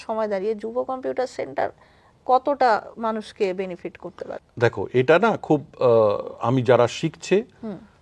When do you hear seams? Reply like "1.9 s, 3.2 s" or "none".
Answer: none

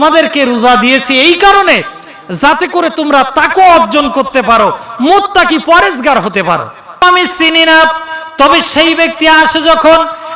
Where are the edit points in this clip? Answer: 7.0 s

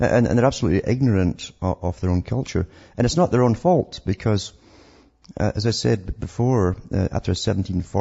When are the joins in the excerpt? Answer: 4.0 s

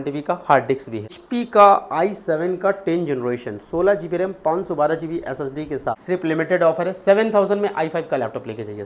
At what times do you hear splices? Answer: 1.2 s, 6.0 s

